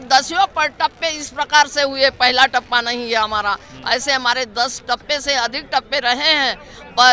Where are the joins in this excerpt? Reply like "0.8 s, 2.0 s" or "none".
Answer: none